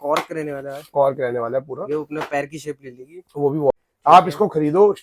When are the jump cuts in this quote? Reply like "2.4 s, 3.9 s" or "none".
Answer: 3.9 s

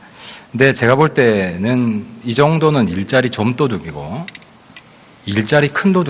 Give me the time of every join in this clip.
none

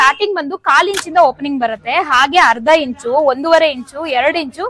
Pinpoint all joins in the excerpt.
none

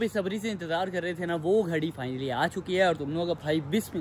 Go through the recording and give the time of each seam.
none

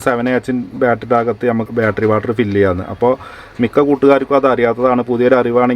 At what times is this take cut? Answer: 1.7 s

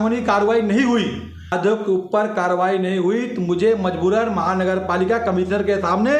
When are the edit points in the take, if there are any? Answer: 1.5 s

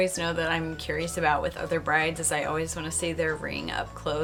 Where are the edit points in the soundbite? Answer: none

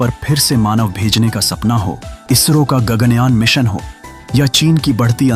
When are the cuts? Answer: 2.1 s

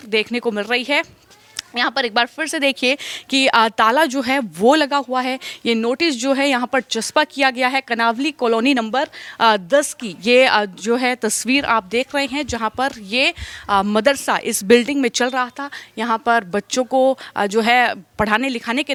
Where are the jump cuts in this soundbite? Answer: none

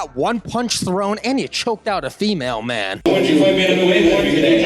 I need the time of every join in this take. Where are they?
2.9 s

